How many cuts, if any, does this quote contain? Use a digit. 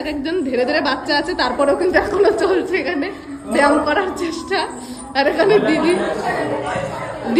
0